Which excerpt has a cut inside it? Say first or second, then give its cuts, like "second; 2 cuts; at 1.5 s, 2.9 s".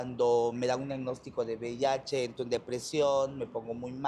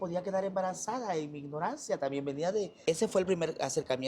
second; 1 cut; at 2.7 s